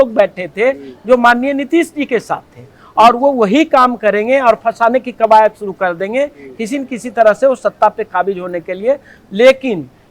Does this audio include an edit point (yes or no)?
no